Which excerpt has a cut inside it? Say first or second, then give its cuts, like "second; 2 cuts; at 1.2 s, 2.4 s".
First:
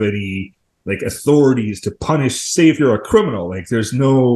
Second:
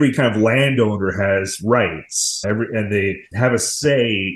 second; 2 cuts; at 2.4 s, 3.3 s